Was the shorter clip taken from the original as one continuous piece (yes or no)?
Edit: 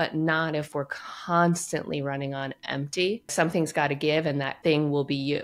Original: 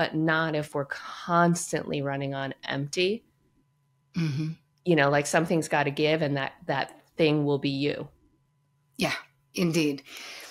no